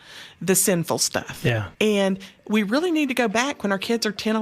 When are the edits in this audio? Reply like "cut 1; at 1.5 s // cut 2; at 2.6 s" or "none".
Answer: cut 1; at 1.3 s